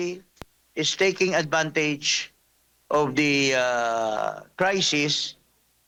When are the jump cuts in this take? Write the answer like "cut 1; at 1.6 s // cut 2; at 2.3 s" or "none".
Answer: none